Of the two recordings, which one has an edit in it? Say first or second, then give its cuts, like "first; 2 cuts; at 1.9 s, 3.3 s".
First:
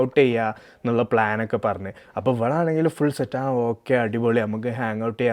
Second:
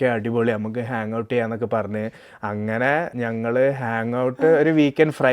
second; 1 cut; at 3.1 s